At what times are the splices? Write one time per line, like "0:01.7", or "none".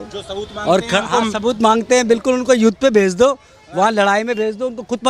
none